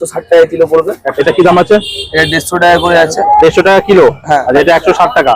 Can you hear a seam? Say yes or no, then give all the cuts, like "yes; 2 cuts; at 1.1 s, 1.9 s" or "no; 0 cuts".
yes; 2 cuts; at 1.1 s, 4.5 s